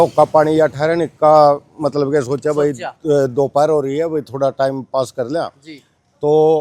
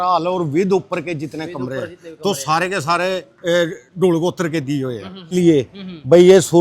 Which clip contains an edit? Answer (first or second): second